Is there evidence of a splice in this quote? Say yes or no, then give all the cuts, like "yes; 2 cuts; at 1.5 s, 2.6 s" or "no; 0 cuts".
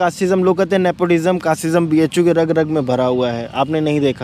no; 0 cuts